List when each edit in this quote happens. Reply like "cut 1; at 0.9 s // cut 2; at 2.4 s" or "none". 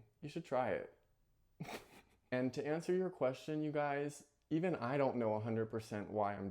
cut 1; at 2.3 s